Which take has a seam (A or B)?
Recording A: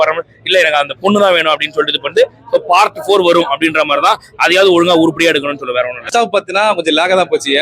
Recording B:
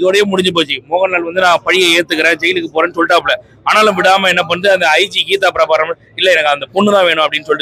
A